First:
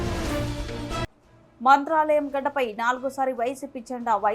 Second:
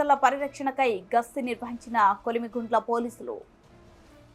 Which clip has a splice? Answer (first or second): first